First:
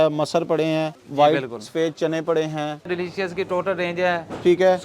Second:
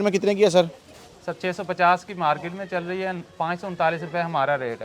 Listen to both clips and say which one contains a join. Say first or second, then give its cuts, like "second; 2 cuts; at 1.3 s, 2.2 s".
first; 2 cuts; at 1.0 s, 2.9 s